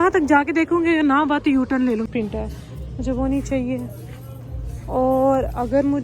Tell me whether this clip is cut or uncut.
cut